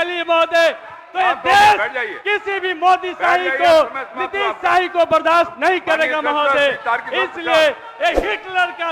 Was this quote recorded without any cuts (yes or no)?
yes